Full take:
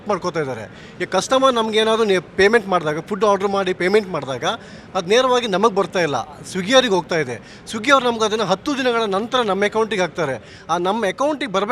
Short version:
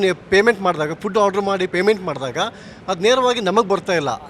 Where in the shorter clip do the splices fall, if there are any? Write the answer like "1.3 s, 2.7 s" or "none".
none